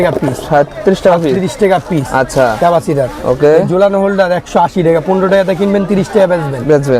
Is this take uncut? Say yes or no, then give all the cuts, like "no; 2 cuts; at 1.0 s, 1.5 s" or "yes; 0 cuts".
yes; 0 cuts